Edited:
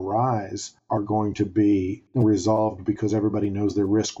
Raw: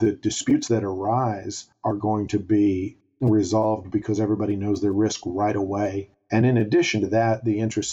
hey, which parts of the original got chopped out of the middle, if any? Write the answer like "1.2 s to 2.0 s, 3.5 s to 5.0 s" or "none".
2.9 s to 3.1 s

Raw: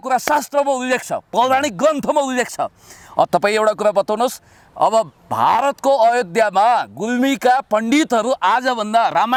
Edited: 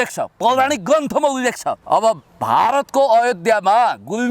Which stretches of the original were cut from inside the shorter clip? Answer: 2.6 s to 4.6 s

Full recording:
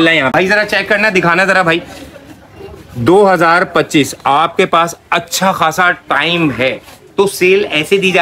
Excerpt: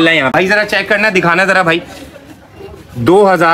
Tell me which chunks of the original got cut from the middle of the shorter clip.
none

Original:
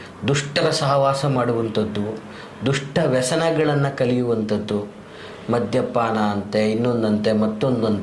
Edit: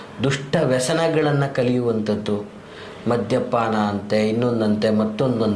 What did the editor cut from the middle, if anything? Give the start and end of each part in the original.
none

